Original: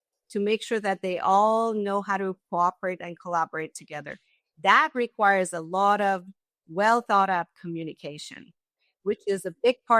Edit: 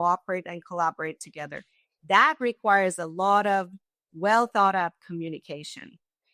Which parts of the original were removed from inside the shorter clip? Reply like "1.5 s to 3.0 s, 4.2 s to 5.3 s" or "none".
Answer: none

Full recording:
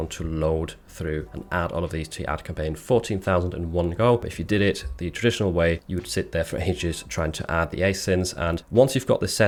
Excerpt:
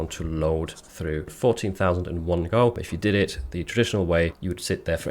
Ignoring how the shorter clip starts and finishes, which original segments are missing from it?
1.3 s to 2.8 s

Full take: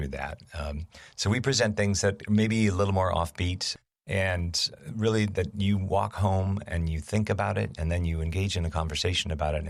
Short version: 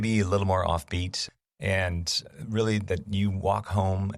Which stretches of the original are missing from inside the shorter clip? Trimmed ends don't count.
none

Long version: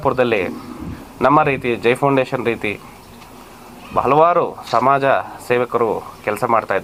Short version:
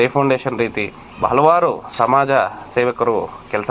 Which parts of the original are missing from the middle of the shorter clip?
2.9 s to 3.7 s

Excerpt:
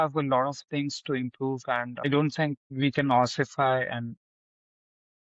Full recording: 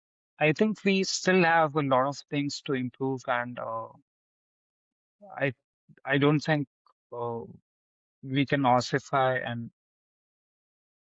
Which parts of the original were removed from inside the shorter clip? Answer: 3.6 s to 6.1 s, 6.7 s to 8.2 s

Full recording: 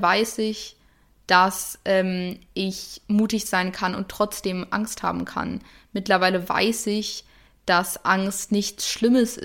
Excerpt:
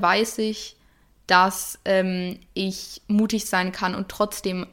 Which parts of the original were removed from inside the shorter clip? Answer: none

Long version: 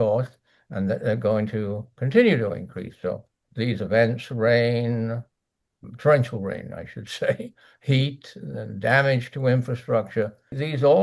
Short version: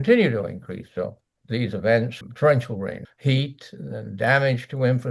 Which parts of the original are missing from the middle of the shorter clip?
4.2 s to 5.8 s, 6.7 s to 7.7 s

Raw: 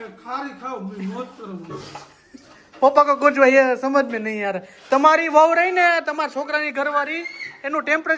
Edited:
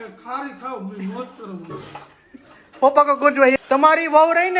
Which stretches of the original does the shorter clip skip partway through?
3.5 s to 4.7 s

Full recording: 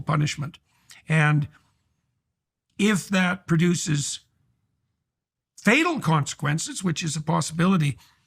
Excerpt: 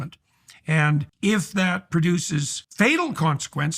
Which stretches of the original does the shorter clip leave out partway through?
1.5 s to 2.7 s, 4.2 s to 5.5 s

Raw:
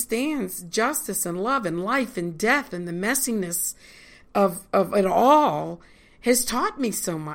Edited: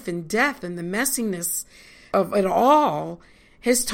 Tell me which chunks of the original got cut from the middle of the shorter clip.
4.1 s to 4.6 s

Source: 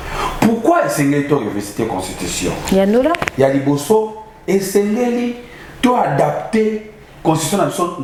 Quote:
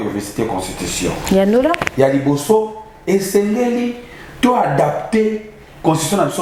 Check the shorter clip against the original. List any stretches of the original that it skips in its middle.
none

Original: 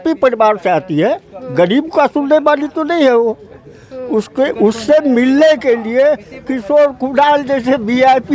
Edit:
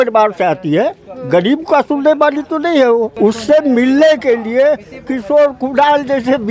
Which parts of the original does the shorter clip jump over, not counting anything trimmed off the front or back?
3.4 s to 4.5 s

